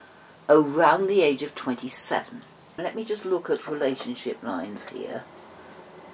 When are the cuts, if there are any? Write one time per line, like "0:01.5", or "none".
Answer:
0:02.8